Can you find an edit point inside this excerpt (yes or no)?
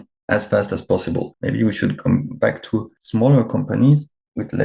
yes